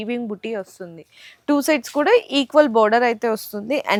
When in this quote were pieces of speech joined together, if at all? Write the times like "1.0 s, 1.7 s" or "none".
none